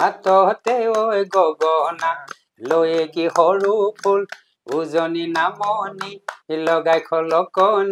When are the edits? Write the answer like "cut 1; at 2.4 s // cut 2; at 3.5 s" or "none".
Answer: none